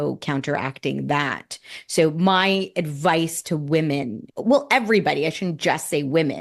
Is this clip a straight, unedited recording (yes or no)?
no